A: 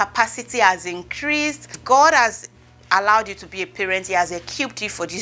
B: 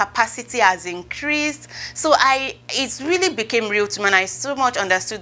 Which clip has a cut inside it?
A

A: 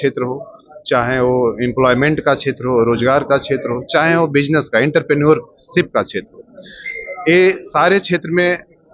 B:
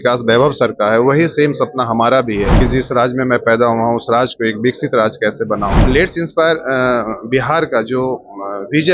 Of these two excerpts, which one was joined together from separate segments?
B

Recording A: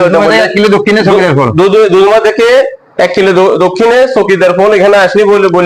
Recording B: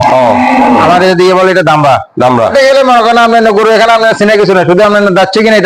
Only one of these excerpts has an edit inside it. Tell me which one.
B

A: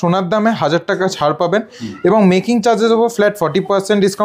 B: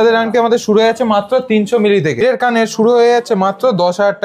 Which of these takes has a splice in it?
B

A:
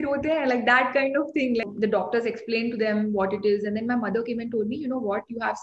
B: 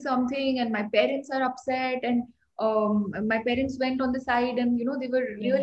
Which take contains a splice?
A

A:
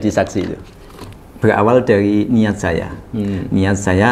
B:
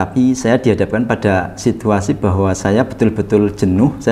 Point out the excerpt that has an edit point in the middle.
A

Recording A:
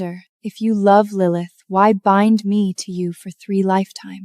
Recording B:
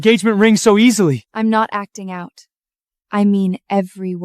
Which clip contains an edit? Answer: B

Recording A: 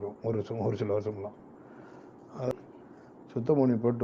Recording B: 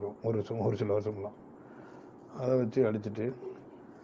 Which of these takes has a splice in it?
A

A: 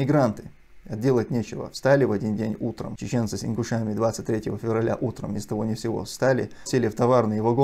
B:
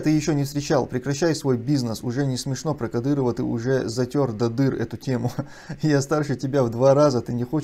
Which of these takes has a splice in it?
A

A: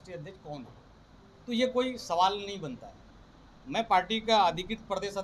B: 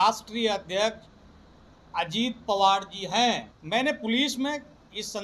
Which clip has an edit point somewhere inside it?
B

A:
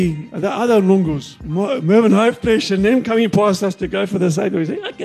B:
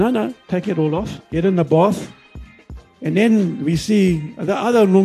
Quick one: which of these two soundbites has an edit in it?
B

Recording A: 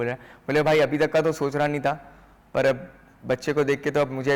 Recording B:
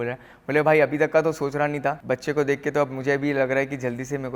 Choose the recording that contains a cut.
B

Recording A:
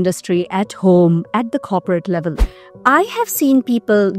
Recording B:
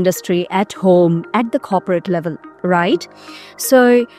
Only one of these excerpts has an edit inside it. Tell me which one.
A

